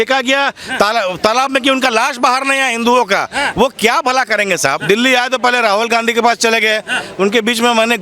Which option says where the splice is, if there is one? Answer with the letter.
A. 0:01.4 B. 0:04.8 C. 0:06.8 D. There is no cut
B